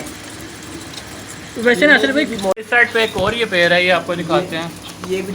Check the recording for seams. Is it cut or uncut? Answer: cut